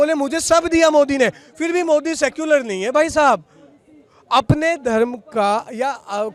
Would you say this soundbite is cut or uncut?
uncut